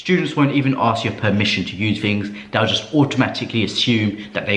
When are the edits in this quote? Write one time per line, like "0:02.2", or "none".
none